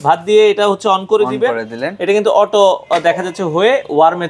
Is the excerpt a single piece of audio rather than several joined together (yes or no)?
yes